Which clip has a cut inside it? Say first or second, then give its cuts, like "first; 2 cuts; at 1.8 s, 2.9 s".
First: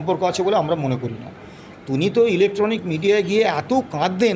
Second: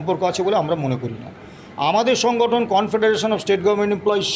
first; 1 cut; at 1.7 s